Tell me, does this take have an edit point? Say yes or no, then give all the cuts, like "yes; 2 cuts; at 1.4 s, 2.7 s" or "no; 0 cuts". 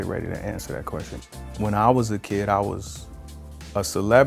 yes; 1 cut; at 1.2 s